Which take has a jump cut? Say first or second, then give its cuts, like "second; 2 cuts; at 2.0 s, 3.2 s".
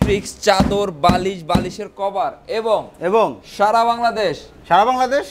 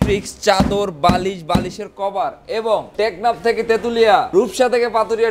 second; 2 cuts; at 2.9 s, 4.3 s